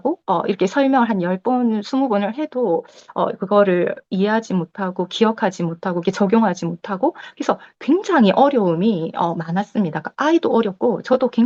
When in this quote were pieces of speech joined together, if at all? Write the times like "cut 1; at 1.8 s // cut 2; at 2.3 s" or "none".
none

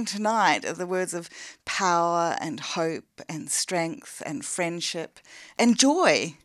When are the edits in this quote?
cut 1; at 5.5 s

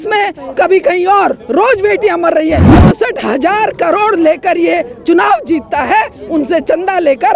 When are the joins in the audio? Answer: cut 1; at 2.7 s

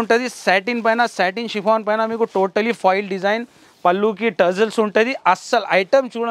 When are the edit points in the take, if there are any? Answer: none

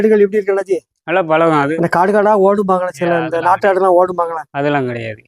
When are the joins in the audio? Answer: cut 1; at 1.7 s

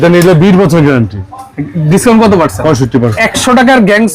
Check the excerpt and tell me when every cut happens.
cut 1; at 3.2 s

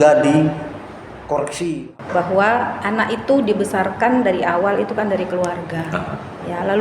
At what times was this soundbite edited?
cut 1; at 1.7 s

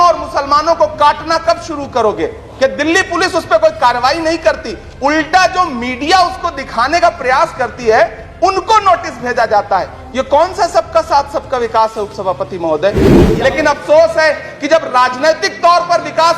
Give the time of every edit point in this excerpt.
cut 1; at 2.4 s // cut 2; at 13.2 s

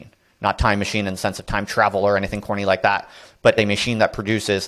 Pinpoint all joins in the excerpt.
cut 1; at 3.5 s

